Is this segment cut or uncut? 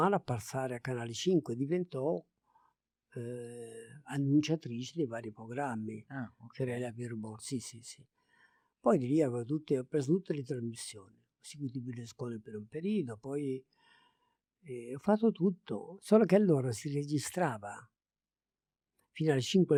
uncut